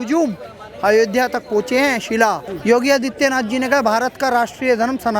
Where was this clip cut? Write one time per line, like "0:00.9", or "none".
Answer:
0:02.5